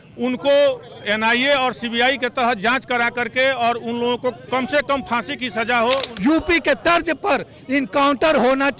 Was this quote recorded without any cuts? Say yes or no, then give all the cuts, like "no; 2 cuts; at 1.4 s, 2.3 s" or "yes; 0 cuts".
no; 1 cut; at 6.1 s